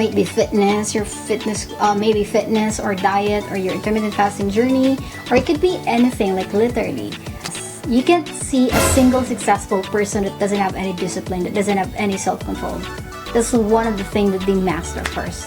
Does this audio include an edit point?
yes; 1 cut; at 7.5 s

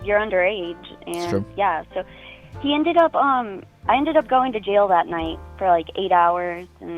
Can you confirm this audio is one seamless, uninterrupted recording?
yes; 0 cuts

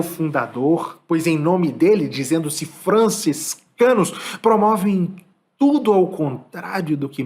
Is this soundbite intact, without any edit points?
no; 1 cut; at 0.9 s

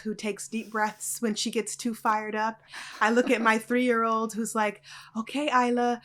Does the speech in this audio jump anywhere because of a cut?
no; 0 cuts

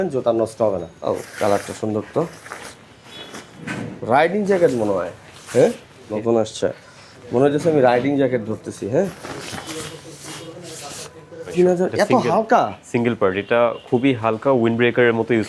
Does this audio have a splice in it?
yes; 3 cuts; at 0.9 s, 6.1 s, 11.5 s

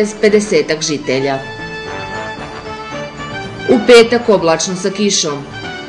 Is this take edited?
no; 0 cuts

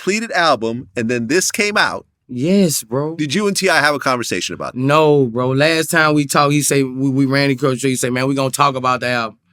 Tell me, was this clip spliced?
yes; 1 cut; at 1.7 s

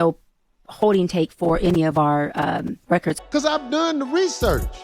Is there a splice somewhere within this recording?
yes; 1 cut; at 3.2 s

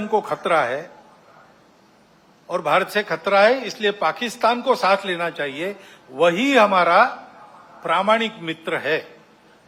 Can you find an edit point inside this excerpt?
no; 0 cuts

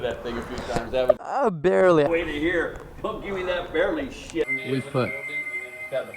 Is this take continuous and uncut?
no; 2 cuts; at 2.0 s, 4.5 s

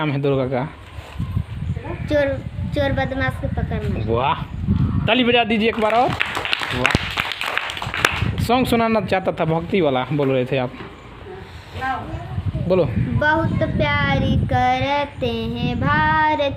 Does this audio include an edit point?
no; 0 cuts

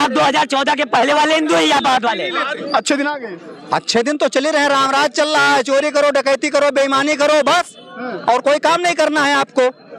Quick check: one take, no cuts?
no; 1 cut; at 2.6 s

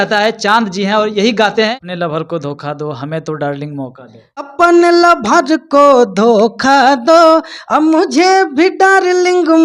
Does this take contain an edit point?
yes; 2 cuts; at 1.8 s, 4.5 s

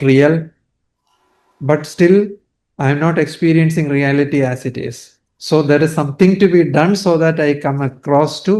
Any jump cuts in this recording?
no; 0 cuts

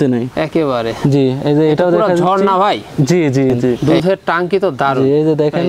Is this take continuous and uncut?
no; 1 cut; at 3.8 s

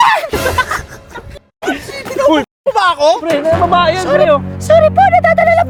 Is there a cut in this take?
no; 0 cuts

